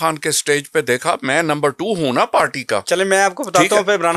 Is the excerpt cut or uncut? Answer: uncut